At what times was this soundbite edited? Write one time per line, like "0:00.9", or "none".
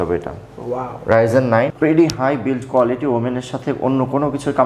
0:01.7